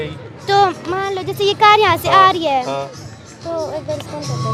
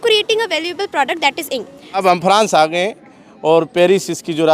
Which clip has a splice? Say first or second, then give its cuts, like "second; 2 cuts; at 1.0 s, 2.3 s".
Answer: second; 1 cut; at 2.0 s